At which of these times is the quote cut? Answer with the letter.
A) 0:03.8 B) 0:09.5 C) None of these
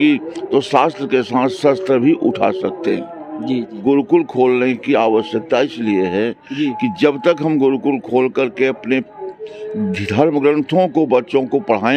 A